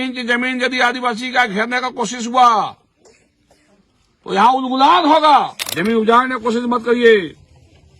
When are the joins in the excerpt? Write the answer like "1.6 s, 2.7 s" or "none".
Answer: 5.6 s

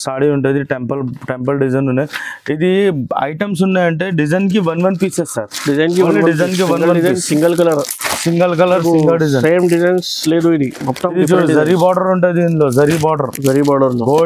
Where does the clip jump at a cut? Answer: none

